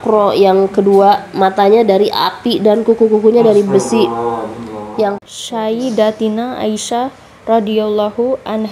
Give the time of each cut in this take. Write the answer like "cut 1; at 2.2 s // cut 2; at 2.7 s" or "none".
cut 1; at 5.2 s